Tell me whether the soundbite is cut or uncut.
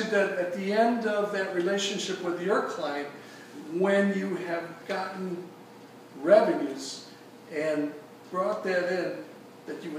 uncut